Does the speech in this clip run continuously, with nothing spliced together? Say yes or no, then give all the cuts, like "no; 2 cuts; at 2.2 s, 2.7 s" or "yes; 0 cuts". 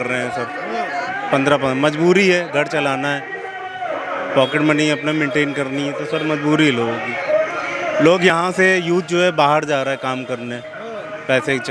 yes; 0 cuts